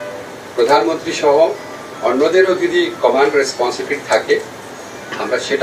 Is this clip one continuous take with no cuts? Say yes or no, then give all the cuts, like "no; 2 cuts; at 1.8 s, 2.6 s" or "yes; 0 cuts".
yes; 0 cuts